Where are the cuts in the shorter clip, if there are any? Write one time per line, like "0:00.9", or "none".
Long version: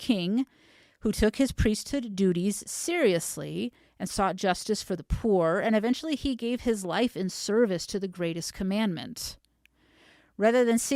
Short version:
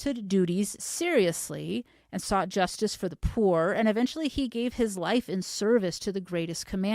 none